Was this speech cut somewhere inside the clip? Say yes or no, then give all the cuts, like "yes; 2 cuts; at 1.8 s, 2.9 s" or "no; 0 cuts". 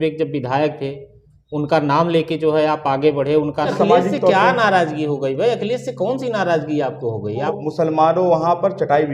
yes; 2 cuts; at 3.7 s, 7.5 s